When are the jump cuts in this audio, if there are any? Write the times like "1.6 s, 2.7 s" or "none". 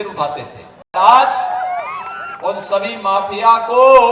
0.9 s

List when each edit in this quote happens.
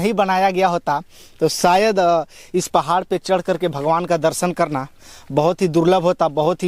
none

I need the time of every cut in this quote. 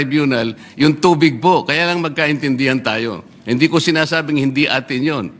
none

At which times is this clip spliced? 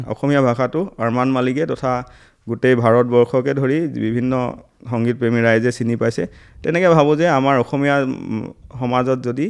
none

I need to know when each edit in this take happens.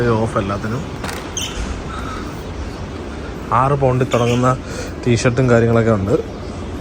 none

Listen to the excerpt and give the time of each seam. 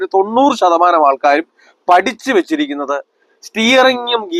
none

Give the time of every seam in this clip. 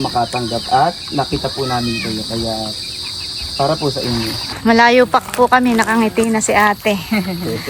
4.6 s

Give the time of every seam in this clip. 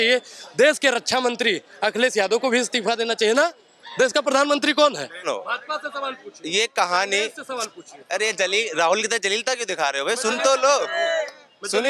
5.2 s

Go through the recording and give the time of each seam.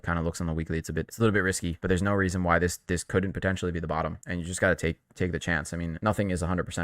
1.1 s, 1.7 s, 4.2 s, 5.9 s

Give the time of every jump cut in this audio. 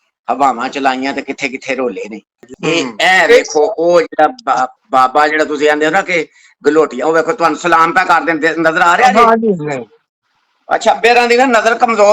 2.5 s

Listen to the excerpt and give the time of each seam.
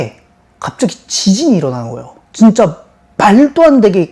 none

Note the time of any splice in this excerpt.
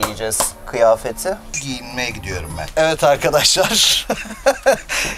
2.7 s

